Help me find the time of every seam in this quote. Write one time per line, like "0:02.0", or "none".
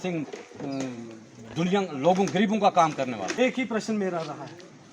0:03.2